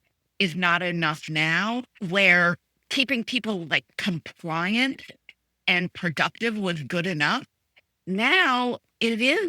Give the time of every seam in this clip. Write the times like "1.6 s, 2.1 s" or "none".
1.9 s